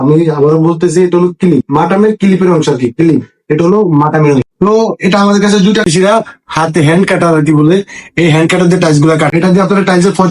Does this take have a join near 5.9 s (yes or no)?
yes